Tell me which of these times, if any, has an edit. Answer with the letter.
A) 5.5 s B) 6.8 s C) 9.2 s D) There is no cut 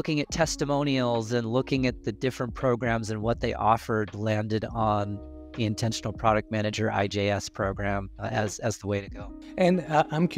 D